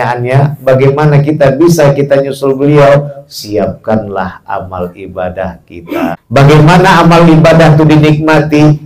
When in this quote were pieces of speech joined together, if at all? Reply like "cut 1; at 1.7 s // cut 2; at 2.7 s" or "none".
cut 1; at 6.2 s